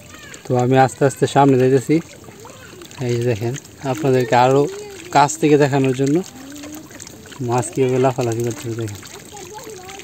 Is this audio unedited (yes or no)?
yes